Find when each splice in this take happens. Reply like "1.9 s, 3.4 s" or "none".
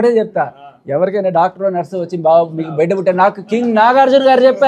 none

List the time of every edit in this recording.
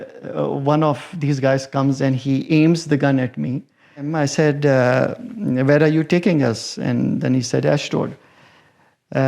4.1 s

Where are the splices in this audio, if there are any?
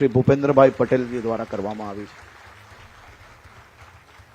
none

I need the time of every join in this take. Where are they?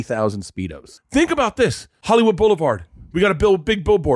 0.9 s, 1.9 s

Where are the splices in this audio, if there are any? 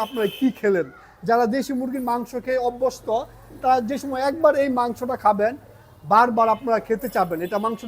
none

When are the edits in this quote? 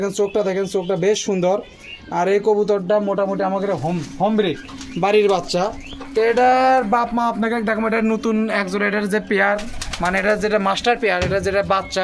none

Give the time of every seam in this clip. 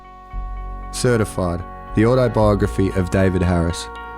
1.0 s

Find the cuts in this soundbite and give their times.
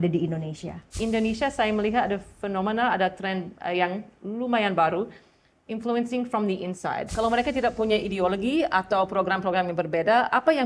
1.0 s, 7.1 s

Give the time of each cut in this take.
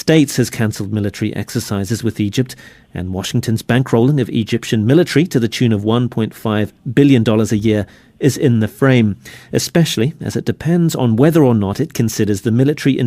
6.8 s

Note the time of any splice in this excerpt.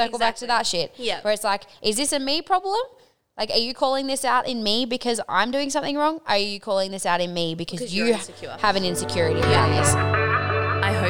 9.7 s

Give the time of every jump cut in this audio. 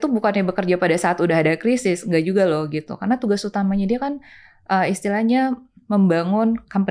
none

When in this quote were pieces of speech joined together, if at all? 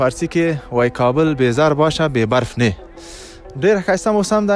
none

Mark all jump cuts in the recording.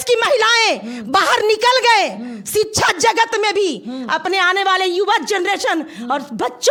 none

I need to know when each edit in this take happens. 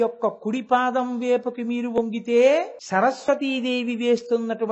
2.8 s

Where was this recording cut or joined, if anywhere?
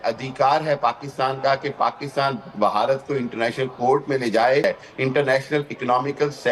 4.6 s

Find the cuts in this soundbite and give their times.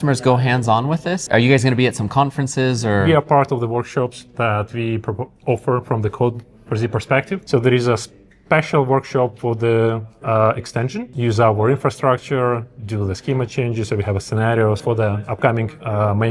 1.2 s, 3.0 s, 7.4 s, 11.1 s, 14.8 s

